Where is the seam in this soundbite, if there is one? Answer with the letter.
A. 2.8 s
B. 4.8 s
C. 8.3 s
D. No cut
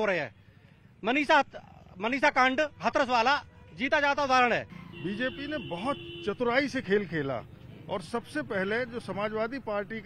B